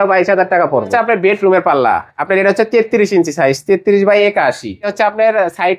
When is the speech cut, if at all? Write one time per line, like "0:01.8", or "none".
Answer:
0:00.9
0:04.9